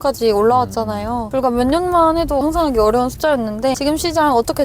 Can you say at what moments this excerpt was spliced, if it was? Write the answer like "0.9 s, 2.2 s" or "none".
2.4 s, 3.8 s